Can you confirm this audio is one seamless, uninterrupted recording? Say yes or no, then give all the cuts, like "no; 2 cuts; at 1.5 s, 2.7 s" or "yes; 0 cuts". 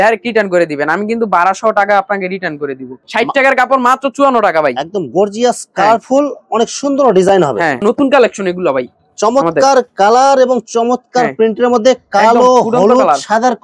no; 2 cuts; at 2.9 s, 7.8 s